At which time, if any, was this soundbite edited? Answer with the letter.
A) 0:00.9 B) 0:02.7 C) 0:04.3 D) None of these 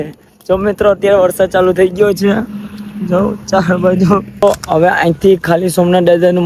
C